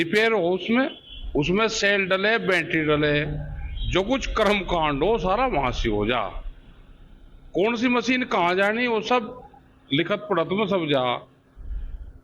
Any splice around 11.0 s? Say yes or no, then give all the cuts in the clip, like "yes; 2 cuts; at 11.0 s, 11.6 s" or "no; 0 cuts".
yes; 1 cut; at 11.0 s